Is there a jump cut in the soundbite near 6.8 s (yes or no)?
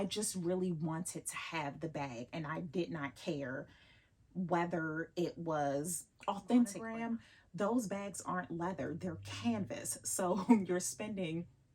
yes